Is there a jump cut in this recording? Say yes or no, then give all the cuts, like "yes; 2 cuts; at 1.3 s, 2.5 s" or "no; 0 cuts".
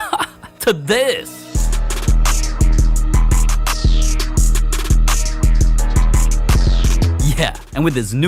no; 0 cuts